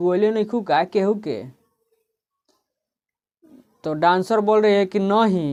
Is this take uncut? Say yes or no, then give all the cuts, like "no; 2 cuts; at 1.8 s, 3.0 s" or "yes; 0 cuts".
yes; 0 cuts